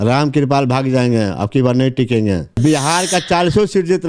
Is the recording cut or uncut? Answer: cut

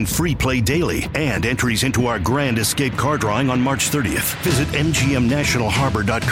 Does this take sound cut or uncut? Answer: uncut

